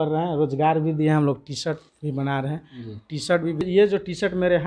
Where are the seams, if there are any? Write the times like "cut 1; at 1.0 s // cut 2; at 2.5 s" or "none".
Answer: cut 1; at 3.6 s

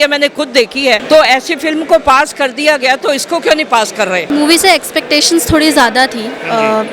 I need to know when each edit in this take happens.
cut 1; at 1.0 s // cut 2; at 4.2 s

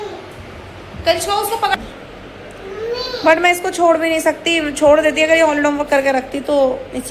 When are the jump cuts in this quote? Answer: cut 1; at 1.7 s

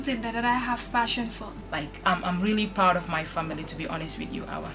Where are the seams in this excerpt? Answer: cut 1; at 1.4 s

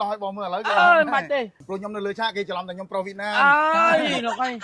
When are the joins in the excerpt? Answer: cut 1; at 1.6 s

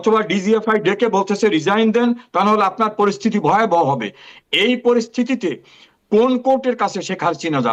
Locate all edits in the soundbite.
none

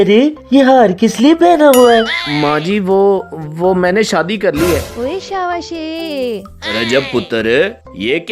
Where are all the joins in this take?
cut 1; at 2.2 s // cut 2; at 4.9 s

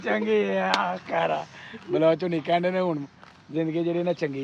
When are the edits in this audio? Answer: none

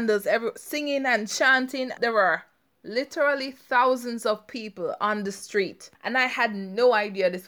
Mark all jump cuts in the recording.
cut 1; at 2.0 s // cut 2; at 5.8 s

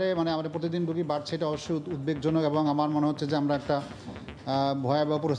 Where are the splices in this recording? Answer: none

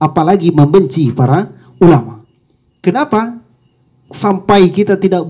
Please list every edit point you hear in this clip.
none

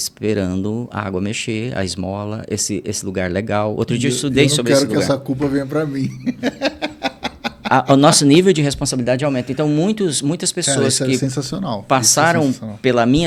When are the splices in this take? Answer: none

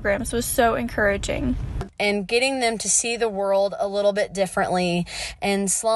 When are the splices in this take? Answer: cut 1; at 1.8 s

